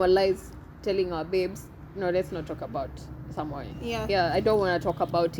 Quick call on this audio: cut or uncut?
uncut